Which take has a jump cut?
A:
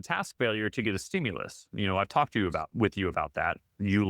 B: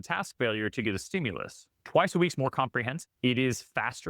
B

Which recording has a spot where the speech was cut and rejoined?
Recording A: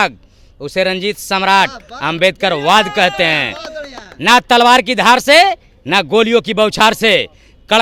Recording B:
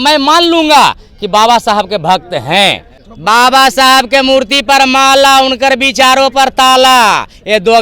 B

